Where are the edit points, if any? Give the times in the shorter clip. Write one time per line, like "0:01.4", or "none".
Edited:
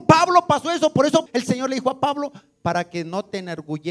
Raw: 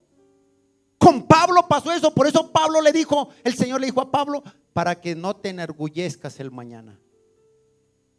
0:01.3